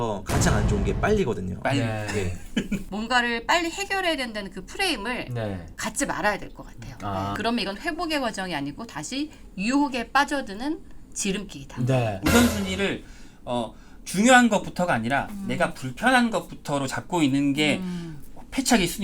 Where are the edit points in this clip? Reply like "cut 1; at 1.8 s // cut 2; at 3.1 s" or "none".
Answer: cut 1; at 2.8 s // cut 2; at 7.3 s // cut 3; at 12.2 s